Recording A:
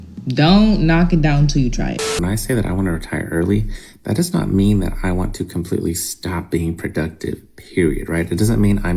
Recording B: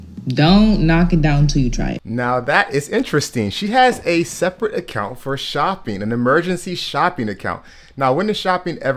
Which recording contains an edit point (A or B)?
A